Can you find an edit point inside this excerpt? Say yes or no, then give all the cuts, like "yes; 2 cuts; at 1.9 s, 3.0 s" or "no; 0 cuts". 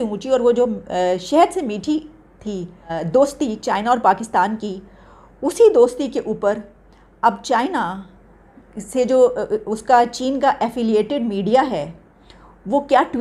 no; 0 cuts